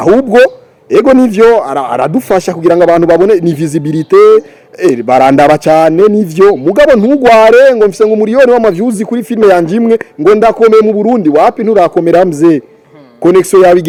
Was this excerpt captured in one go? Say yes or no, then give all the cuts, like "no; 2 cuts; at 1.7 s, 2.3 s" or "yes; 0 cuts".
yes; 0 cuts